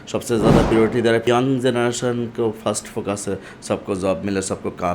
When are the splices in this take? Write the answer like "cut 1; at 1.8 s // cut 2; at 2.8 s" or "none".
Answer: cut 1; at 1.2 s